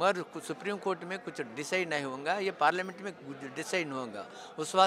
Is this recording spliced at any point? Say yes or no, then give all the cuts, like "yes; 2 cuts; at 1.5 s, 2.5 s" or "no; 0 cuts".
no; 0 cuts